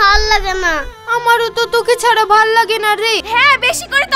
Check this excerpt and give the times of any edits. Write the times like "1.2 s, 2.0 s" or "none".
3.2 s